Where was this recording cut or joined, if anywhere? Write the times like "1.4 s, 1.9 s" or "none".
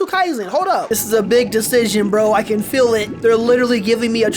0.9 s, 3.1 s